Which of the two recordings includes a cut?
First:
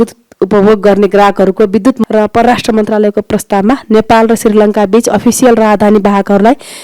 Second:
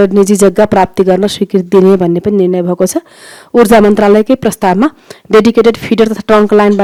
first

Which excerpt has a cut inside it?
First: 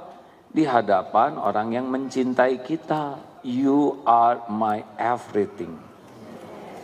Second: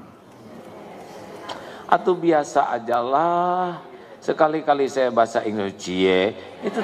first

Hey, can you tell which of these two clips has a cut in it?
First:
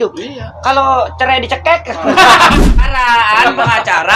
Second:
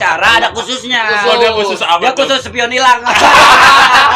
first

